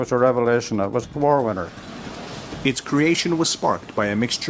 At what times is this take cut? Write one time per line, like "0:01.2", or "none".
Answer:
0:01.0